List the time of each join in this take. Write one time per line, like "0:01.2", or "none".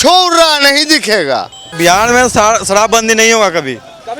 0:01.7